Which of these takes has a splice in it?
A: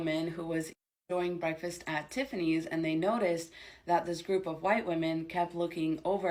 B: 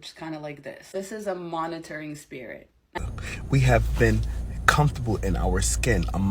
B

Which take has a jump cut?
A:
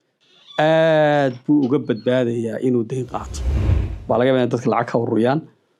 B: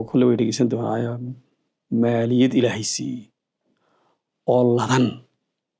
A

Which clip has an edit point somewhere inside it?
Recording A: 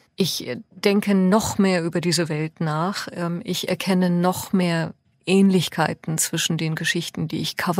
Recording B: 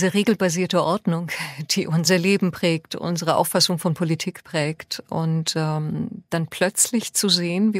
B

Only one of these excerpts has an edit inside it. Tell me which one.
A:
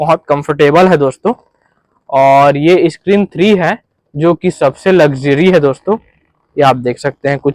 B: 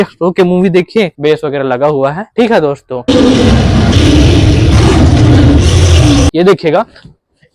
B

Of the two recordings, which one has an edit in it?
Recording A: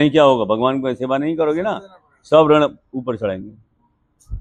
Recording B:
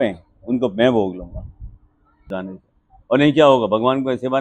B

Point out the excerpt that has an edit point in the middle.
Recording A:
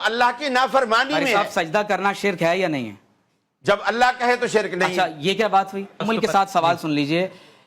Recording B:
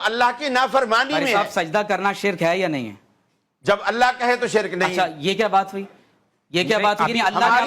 A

